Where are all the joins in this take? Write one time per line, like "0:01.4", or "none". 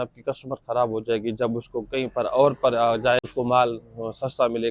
0:03.2